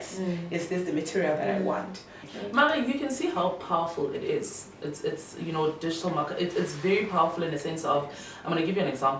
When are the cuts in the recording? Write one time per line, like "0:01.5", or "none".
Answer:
0:02.2